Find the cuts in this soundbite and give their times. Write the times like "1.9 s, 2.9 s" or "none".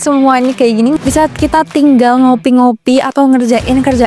1.0 s